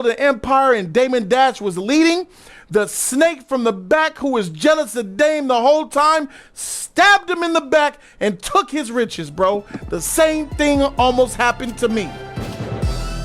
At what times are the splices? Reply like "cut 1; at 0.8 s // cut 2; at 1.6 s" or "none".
cut 1; at 12.3 s

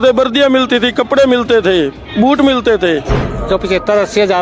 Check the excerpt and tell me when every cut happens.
cut 1; at 3.3 s

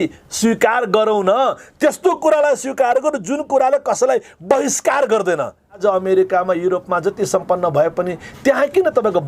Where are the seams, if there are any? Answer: cut 1; at 5.8 s

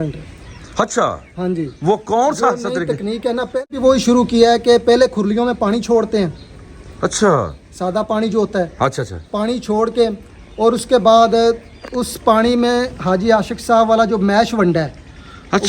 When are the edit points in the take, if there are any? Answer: cut 1; at 3.7 s

